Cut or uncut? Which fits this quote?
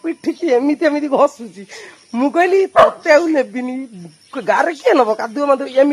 uncut